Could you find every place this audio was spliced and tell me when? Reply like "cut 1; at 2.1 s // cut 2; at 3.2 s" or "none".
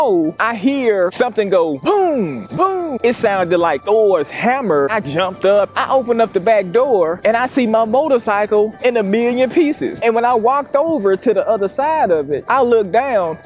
cut 1; at 2.9 s // cut 2; at 4.9 s // cut 3; at 5.8 s // cut 4; at 10.0 s